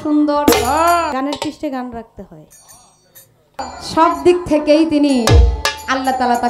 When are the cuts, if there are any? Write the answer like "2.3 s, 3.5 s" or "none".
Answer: 1.1 s, 3.6 s